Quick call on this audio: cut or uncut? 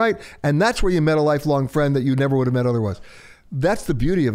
uncut